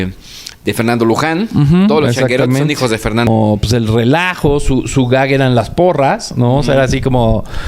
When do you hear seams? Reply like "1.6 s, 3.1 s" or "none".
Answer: 3.3 s